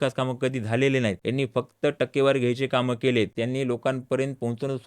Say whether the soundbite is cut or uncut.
cut